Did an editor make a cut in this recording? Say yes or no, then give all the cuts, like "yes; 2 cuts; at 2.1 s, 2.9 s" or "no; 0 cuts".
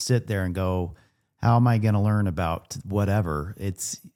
no; 0 cuts